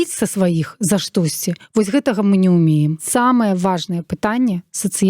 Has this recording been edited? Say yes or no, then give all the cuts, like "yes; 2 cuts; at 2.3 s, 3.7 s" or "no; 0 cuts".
yes; 1 cut; at 3.0 s